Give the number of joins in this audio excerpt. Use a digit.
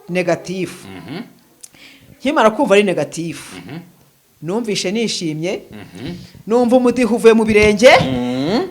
0